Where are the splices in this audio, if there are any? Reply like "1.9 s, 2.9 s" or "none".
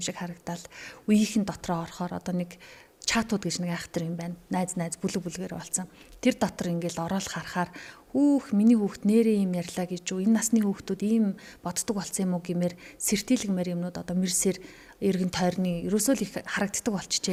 none